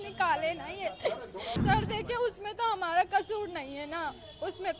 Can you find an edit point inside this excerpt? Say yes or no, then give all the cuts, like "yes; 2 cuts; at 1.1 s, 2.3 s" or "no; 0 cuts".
yes; 1 cut; at 1.6 s